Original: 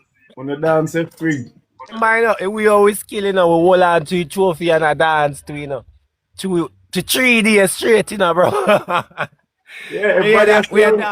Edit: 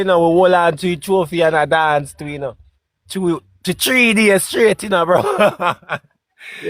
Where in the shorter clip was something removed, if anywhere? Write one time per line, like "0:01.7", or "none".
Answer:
none